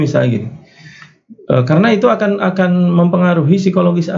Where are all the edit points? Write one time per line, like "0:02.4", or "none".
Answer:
none